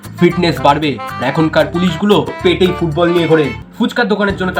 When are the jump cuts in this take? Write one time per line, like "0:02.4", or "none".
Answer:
0:03.6